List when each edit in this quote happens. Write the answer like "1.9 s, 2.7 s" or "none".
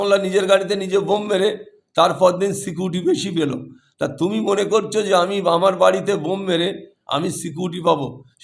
none